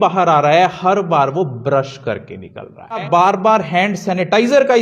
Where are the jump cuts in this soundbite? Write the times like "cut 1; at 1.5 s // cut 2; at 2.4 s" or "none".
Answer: cut 1; at 3.0 s